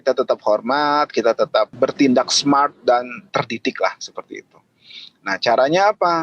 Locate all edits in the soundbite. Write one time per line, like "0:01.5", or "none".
0:01.7
0:03.2